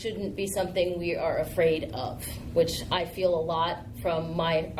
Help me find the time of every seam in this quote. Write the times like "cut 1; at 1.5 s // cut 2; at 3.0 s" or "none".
none